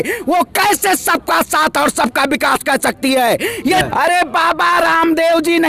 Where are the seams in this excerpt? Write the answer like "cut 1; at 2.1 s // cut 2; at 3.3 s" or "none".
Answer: cut 1; at 3.9 s